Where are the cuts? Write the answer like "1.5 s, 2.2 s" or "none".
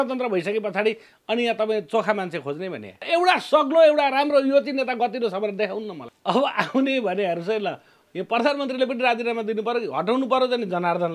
3.0 s, 6.0 s